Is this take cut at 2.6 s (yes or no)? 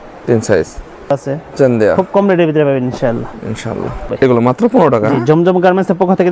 no